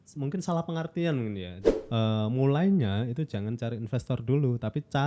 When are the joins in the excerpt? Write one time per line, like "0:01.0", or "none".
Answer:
0:01.6